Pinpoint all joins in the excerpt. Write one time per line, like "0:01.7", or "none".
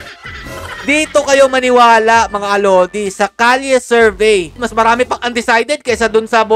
0:04.5